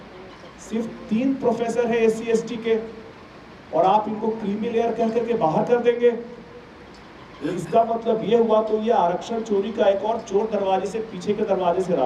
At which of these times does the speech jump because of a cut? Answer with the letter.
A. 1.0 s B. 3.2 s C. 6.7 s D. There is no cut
D